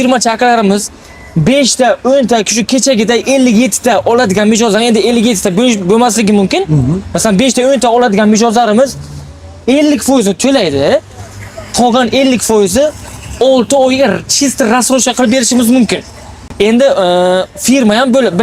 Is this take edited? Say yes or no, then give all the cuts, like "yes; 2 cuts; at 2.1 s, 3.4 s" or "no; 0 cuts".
no; 0 cuts